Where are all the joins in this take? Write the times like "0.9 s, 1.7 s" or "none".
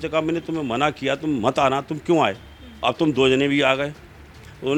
none